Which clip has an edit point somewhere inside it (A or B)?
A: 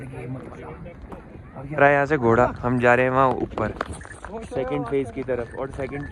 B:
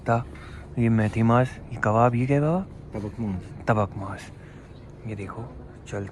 A